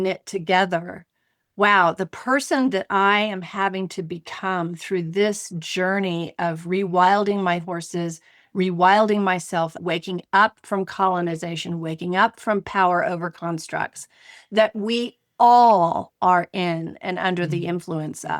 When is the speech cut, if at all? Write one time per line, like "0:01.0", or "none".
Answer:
0:09.8